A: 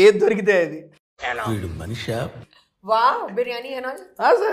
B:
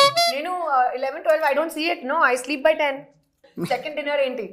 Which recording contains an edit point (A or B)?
B